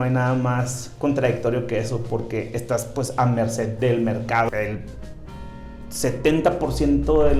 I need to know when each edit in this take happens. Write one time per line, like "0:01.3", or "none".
0:04.5